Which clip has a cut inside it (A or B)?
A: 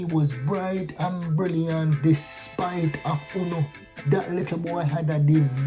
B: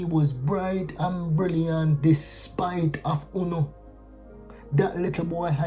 A